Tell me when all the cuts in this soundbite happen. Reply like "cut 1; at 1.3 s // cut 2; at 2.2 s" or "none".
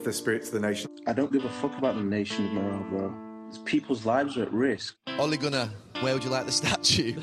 none